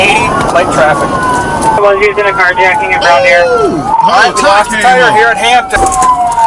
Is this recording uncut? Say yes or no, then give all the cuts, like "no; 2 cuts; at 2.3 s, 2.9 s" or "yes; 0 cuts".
no; 2 cuts; at 1.8 s, 5.8 s